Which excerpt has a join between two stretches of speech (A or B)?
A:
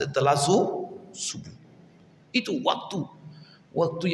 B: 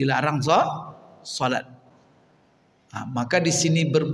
B